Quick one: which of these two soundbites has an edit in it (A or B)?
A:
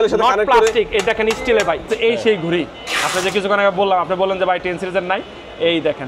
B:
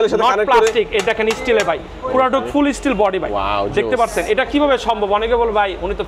A